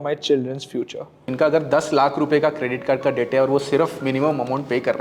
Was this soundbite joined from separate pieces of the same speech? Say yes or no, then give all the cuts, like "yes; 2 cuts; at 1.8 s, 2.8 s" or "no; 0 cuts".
yes; 1 cut; at 1.3 s